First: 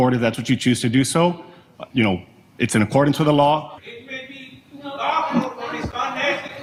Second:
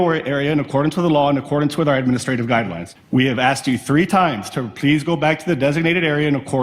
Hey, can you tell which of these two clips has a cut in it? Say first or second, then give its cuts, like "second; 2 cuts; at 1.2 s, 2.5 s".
second; 1 cut; at 2.8 s